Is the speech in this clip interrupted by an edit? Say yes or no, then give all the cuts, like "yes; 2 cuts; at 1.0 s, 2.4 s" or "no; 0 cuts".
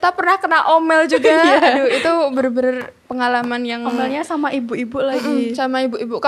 no; 0 cuts